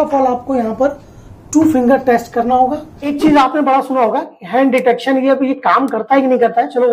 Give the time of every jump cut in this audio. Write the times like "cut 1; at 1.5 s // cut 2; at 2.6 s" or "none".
cut 1; at 3.1 s

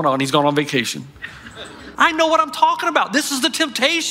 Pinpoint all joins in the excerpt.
cut 1; at 1.6 s

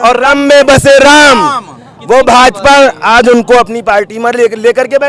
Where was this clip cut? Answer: none

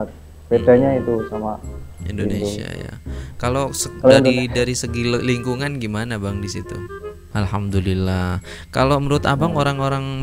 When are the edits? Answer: cut 1; at 7.2 s

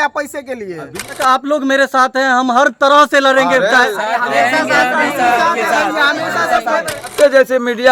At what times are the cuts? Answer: cut 1; at 1.2 s // cut 2; at 7.1 s

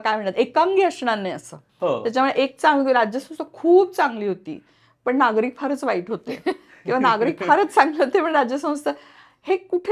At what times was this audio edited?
cut 1; at 1.7 s

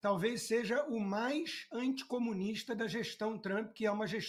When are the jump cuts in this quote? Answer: none

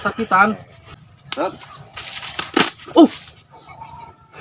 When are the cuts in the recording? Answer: cut 1; at 1.1 s

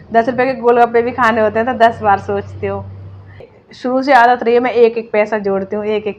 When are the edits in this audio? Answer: cut 1; at 3.5 s

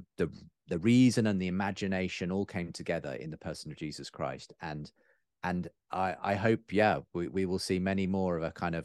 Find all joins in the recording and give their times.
none

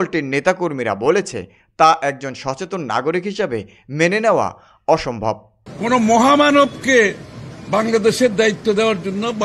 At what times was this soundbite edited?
cut 1; at 5.6 s

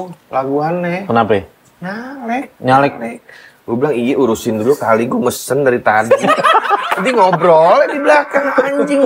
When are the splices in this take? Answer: none

